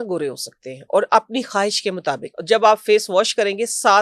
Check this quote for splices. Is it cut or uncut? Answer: cut